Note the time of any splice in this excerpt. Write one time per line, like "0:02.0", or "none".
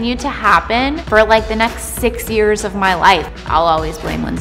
0:01.0
0:03.3